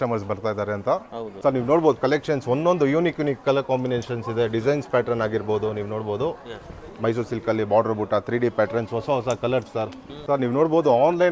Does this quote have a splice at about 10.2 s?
yes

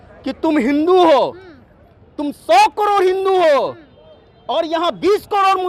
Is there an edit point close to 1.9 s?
no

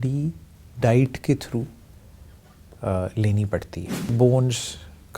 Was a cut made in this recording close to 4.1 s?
yes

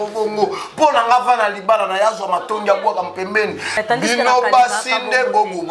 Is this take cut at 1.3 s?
no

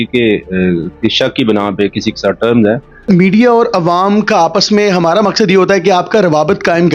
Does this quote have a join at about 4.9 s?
no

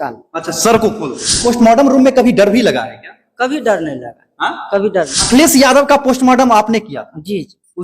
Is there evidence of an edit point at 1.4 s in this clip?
yes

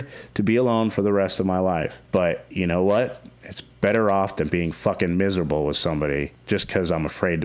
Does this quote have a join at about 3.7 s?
no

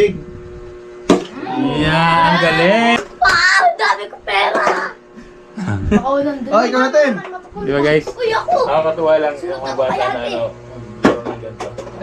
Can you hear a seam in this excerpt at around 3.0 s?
yes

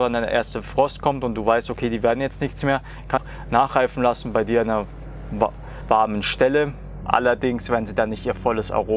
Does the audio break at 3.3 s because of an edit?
yes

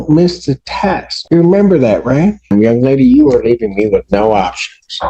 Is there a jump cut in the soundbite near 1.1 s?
yes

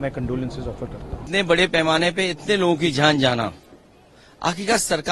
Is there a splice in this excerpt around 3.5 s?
no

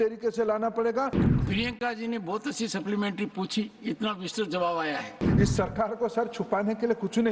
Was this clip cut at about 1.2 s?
yes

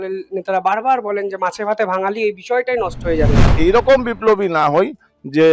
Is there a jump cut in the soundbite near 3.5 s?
yes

